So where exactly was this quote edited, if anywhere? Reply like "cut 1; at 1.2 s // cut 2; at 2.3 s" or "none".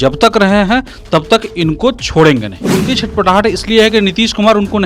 cut 1; at 2.7 s